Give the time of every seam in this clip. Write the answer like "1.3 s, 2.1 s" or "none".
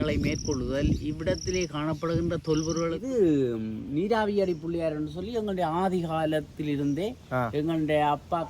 3.0 s